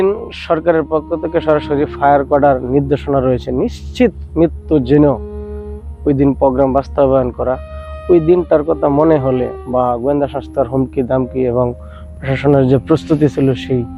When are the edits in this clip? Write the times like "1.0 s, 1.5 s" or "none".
none